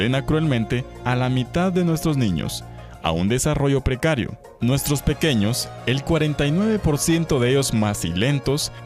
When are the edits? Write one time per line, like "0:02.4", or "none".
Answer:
0:07.5

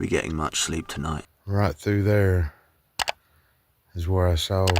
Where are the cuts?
0:01.3

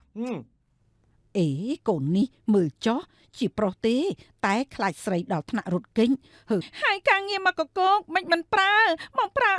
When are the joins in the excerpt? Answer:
0:06.7

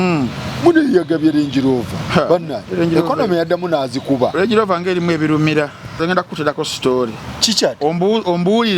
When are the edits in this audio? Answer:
0:05.9

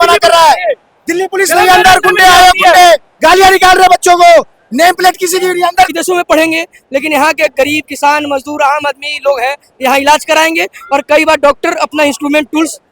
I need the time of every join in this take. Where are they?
0:05.9

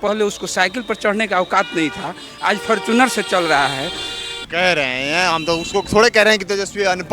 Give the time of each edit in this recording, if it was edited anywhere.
0:04.5

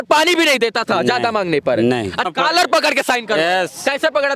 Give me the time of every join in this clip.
0:02.3

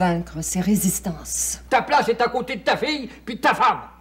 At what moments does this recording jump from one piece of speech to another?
0:01.6

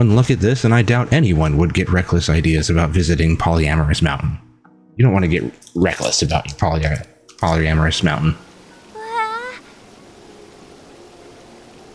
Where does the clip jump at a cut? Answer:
none

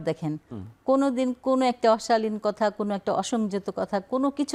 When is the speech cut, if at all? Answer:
none

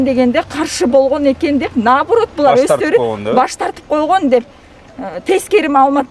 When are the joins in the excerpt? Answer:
none

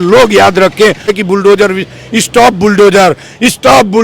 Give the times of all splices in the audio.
0:01.1

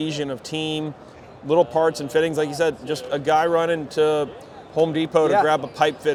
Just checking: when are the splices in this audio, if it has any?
none

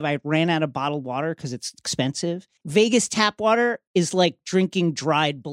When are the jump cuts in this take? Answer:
0:02.6
0:03.8

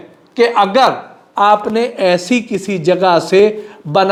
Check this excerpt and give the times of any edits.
none

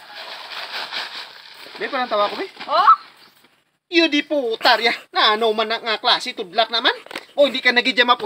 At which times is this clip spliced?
0:03.5

